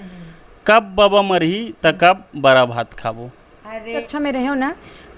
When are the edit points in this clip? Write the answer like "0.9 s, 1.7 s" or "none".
4.1 s